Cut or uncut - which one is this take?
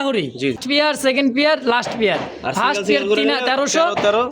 cut